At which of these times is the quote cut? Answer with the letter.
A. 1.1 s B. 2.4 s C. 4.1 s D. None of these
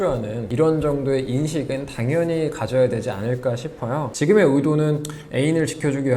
C